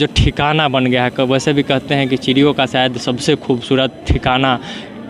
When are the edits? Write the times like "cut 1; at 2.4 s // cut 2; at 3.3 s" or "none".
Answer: none